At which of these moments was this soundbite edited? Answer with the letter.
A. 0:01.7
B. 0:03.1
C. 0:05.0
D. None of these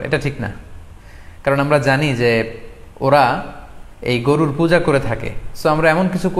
D